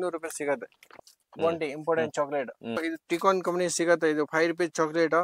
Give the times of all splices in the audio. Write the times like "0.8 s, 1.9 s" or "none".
1.1 s, 2.8 s